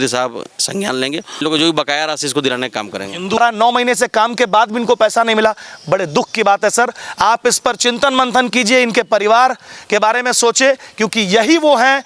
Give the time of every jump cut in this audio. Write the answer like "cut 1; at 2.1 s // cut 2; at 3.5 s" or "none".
cut 1; at 1.4 s // cut 2; at 3.4 s